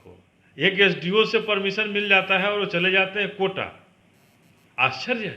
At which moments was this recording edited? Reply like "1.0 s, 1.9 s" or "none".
none

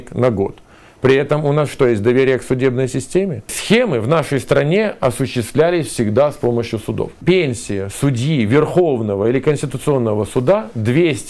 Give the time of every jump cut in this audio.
3.6 s, 7.2 s

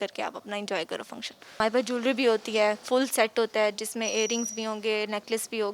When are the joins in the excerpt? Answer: 1.5 s

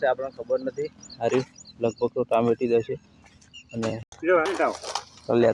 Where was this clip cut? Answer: 4.1 s

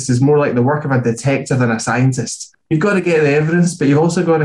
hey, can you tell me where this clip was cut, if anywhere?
none

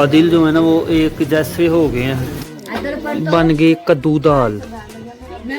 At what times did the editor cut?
2.3 s

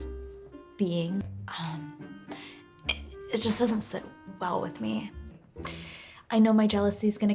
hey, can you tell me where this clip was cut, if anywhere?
5.4 s

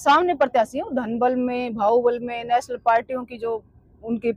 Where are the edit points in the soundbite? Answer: none

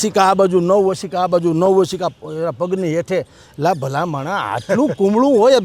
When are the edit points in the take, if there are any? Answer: none

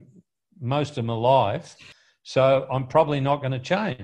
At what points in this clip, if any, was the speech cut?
1.9 s

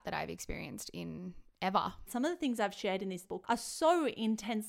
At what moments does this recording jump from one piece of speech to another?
2.1 s, 3.2 s

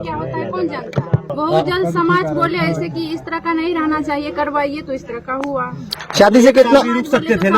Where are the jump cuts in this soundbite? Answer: 1.3 s

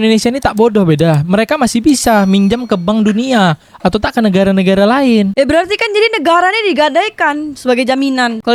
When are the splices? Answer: none

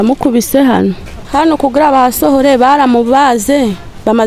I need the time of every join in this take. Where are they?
1.1 s

